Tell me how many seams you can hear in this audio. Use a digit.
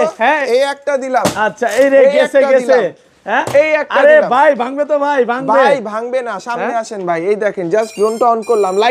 0